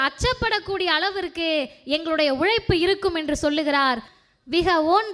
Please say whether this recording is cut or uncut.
cut